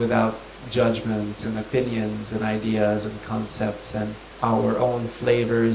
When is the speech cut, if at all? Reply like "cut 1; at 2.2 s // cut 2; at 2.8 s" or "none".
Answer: cut 1; at 4.2 s